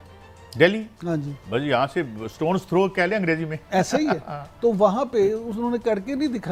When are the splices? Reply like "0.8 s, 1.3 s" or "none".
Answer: none